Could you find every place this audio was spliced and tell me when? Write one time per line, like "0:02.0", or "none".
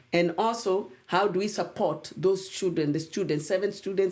none